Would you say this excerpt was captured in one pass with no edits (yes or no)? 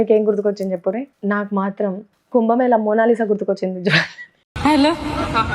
no